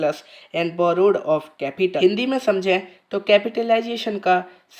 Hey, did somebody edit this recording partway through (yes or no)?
yes